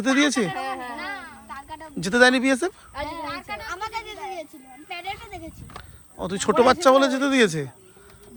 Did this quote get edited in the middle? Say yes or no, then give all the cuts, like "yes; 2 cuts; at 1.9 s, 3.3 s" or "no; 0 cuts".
no; 0 cuts